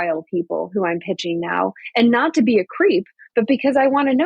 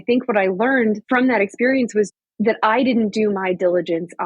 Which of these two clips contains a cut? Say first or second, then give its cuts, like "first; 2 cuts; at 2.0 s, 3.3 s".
second; 2 cuts; at 1.0 s, 2.1 s